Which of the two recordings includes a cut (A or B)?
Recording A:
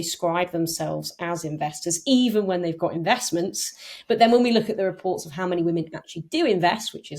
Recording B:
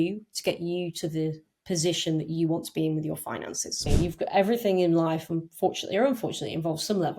B